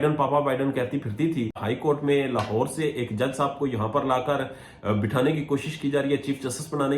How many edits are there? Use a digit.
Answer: 1